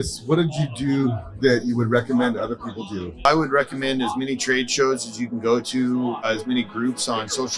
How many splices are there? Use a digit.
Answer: 3